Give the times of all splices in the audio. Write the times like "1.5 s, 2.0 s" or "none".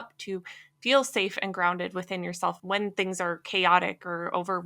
2.6 s